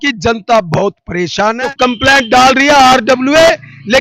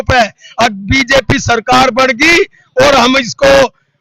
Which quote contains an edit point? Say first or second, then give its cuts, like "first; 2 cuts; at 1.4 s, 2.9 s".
first; 1 cut; at 1.6 s